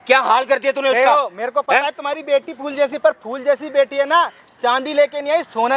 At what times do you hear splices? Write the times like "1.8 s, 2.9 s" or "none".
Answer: none